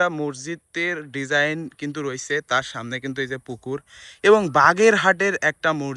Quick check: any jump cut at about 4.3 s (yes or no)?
no